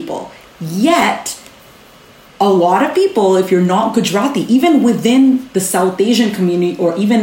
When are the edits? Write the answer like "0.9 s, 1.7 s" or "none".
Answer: none